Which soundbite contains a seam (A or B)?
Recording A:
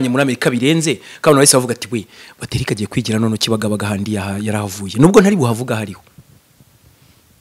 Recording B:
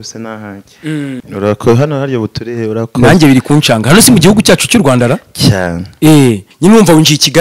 B